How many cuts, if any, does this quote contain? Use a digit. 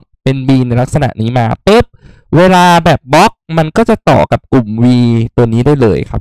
0